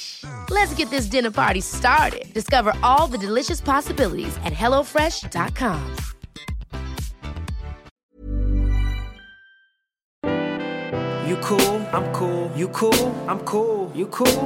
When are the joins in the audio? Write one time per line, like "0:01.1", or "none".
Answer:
0:10.2